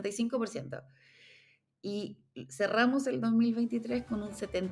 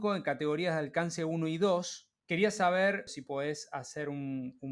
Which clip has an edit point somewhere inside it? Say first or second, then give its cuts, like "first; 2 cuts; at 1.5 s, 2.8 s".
second; 2 cuts; at 2.1 s, 3.1 s